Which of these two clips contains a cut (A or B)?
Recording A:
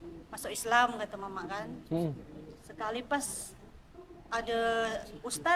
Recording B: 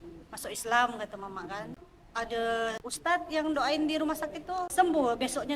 B